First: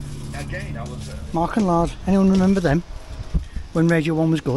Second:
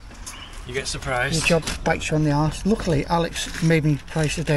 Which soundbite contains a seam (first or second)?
first